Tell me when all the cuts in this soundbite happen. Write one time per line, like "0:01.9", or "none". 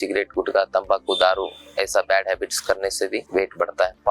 none

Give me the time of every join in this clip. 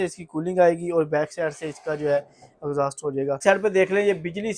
0:03.4

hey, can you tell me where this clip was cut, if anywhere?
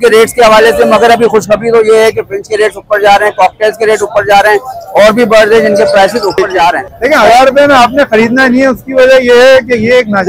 0:06.9

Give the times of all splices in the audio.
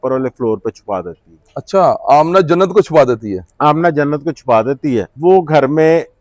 0:05.1

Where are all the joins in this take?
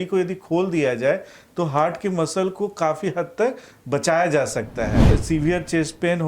0:05.0

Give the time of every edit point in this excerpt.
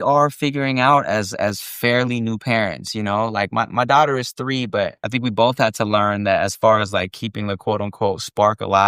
0:05.0

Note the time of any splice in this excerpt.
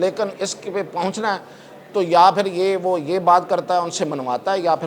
none

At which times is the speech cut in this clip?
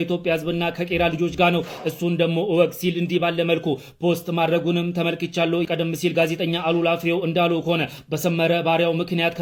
none

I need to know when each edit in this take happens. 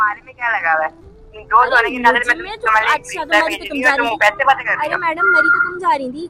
none

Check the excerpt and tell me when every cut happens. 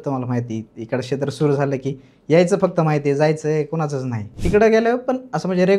0:04.3

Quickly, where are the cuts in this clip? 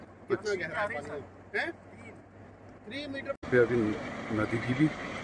0:03.4

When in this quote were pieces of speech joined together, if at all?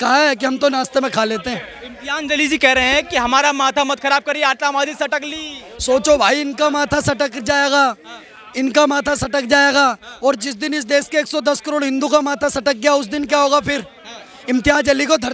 none

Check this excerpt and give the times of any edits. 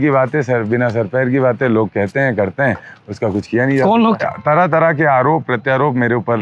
0:04.2

